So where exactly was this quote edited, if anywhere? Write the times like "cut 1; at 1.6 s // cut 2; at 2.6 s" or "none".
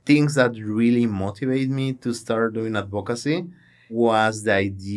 cut 1; at 3.9 s